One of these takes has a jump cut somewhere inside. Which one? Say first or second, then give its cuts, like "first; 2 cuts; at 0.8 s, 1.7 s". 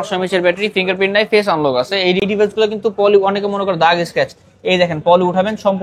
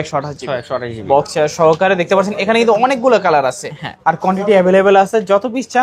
first; 1 cut; at 2.2 s